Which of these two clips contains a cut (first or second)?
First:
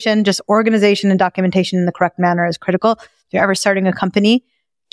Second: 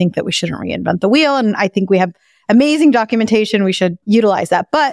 second